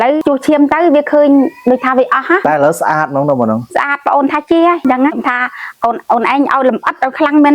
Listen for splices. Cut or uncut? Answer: cut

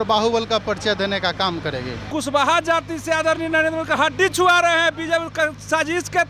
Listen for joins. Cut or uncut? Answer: cut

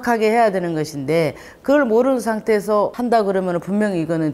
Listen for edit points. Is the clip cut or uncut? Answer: cut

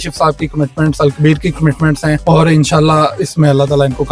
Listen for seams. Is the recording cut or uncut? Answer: cut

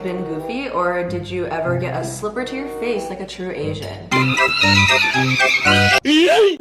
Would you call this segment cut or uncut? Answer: uncut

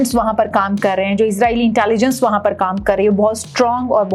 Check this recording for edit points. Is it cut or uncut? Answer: uncut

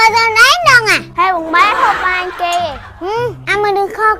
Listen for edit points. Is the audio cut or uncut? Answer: uncut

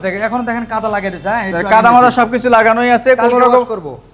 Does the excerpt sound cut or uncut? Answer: uncut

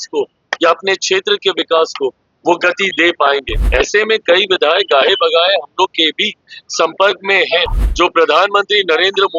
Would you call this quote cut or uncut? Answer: cut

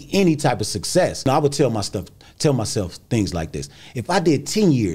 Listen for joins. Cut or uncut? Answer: cut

